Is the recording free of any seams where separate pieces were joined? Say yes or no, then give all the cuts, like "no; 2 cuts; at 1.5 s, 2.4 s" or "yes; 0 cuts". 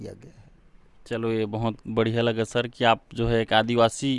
yes; 0 cuts